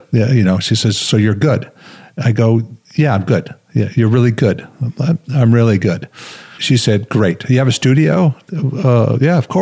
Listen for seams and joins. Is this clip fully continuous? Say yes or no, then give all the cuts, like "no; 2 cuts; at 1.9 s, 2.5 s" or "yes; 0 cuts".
no; 1 cut; at 6.6 s